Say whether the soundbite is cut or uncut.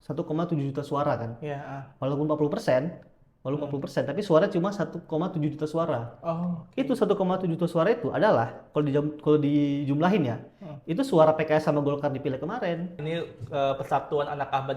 cut